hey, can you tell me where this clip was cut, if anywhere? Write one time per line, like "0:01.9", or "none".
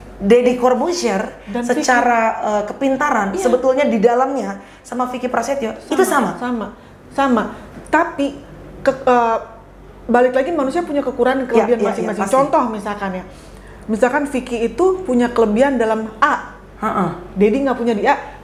none